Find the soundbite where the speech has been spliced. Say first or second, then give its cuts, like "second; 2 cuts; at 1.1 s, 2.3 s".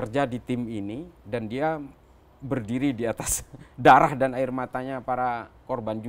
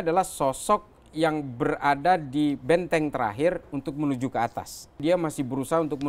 second; 1 cut; at 5.0 s